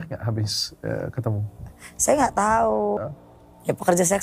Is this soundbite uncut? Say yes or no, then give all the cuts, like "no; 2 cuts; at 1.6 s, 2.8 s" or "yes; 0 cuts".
no; 1 cut; at 3.0 s